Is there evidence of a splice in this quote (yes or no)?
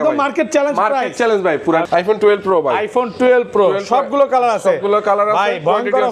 yes